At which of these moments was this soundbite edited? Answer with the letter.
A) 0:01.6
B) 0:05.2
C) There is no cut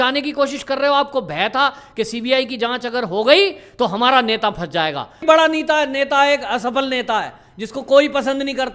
B